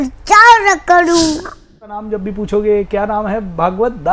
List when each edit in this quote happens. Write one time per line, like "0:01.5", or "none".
0:01.9